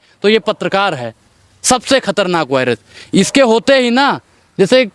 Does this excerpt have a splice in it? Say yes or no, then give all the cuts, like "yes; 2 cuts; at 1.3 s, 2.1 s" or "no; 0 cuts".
no; 0 cuts